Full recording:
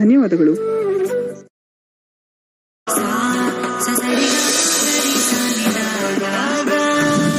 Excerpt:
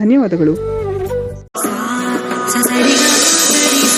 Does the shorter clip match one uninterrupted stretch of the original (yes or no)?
no